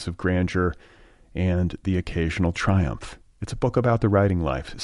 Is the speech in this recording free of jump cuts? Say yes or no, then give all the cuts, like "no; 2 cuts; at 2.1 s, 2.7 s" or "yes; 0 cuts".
yes; 0 cuts